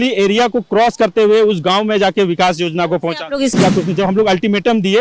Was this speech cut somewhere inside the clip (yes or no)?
yes